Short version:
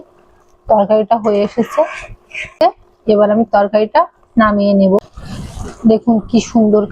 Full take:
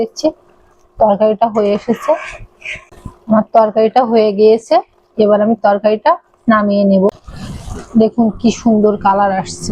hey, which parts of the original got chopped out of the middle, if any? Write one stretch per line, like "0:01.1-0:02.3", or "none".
0:02.8-0:04.6